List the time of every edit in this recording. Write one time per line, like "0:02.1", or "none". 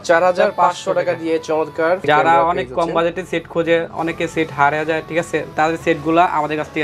0:02.0
0:05.5